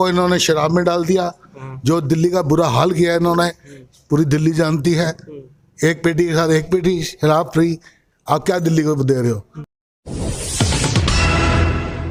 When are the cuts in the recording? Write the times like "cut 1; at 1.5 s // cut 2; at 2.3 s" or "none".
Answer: none